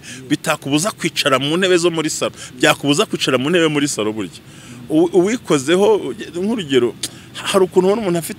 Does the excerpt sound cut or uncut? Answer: uncut